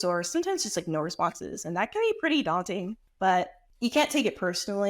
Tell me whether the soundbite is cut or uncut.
cut